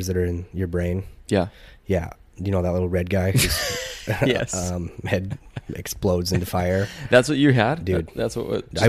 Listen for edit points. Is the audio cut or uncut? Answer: uncut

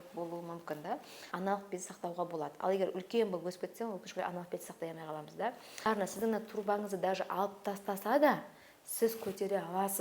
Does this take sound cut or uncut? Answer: cut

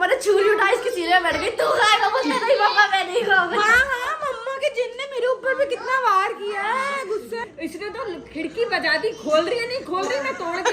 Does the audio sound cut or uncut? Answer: cut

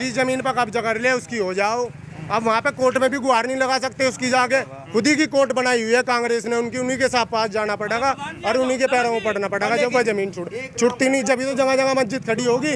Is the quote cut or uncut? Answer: uncut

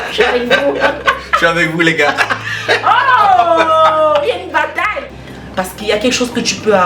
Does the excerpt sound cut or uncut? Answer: cut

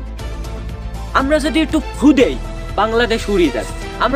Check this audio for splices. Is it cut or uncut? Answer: uncut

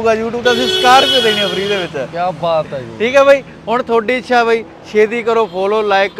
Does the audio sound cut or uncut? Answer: uncut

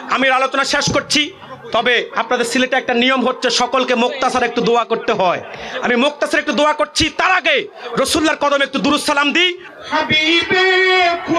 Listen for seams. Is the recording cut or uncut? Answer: cut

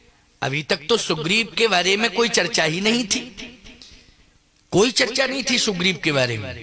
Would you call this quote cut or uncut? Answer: uncut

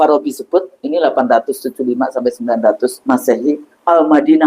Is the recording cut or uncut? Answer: cut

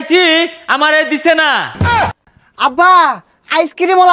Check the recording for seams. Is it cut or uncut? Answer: cut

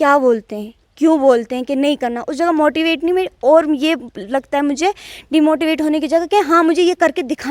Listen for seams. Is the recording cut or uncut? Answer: uncut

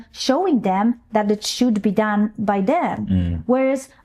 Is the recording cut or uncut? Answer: uncut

